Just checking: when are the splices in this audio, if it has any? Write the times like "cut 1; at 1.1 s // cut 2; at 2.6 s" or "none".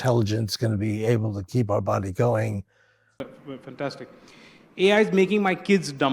cut 1; at 3.2 s